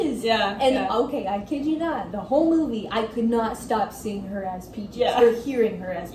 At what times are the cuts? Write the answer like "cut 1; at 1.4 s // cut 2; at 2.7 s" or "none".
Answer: none